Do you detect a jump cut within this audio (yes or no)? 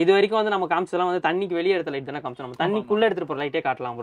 no